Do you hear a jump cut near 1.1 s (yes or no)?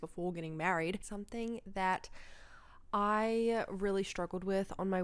yes